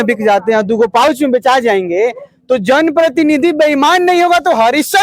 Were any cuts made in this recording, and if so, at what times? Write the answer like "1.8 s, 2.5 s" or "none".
none